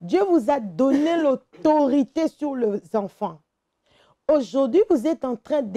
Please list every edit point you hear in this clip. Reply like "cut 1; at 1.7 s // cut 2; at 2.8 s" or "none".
none